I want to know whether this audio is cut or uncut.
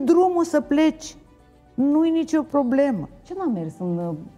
cut